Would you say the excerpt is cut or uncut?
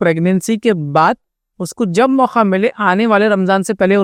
uncut